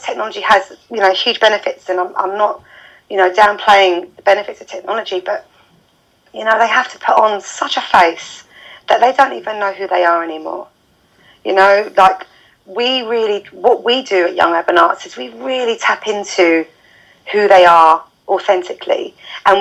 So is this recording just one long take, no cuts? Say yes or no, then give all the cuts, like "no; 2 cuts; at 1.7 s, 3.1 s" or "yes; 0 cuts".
yes; 0 cuts